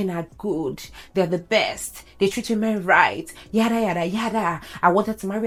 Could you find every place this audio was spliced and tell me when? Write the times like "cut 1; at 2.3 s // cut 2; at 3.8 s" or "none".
none